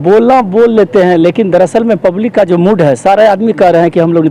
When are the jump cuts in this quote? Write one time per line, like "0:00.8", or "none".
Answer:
none